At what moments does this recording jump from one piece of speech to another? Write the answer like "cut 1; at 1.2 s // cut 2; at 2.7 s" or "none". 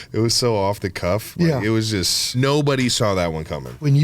cut 1; at 2.3 s